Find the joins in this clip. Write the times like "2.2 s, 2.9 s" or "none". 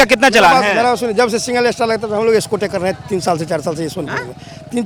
none